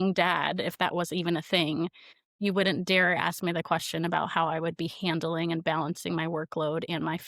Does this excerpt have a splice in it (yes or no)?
no